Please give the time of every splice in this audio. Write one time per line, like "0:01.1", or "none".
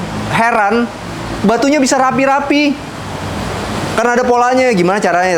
none